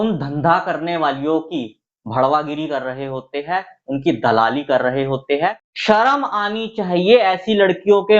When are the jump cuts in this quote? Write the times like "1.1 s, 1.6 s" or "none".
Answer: 5.7 s